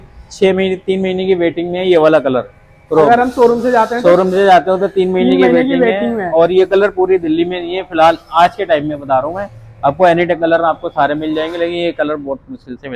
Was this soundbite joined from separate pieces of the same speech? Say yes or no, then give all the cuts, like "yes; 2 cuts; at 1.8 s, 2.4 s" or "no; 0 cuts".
no; 0 cuts